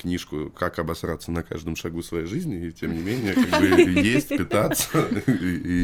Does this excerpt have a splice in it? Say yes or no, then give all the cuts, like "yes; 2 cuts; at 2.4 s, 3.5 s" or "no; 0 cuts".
no; 0 cuts